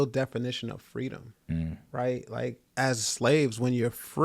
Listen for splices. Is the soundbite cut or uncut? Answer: cut